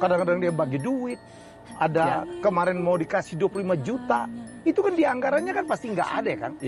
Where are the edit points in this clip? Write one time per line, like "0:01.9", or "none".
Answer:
none